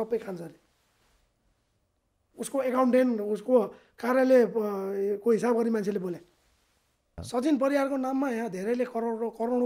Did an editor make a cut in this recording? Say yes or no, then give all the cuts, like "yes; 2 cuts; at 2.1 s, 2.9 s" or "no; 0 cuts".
yes; 1 cut; at 7.2 s